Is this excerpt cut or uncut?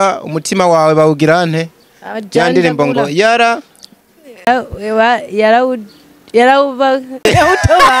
cut